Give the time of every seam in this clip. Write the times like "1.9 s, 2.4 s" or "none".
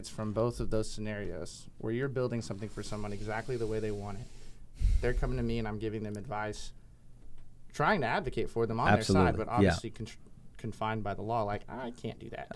none